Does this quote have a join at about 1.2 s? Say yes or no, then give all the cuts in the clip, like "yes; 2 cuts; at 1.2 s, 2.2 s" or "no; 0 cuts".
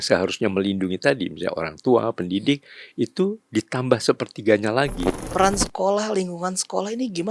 no; 1 cut; at 5.1 s